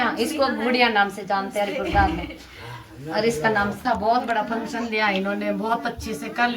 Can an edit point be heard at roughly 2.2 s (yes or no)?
no